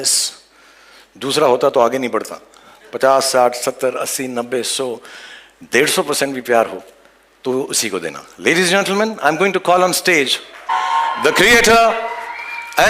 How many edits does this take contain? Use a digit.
1